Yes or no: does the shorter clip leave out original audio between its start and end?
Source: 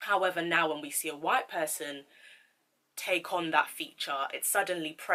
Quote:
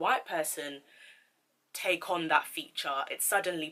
no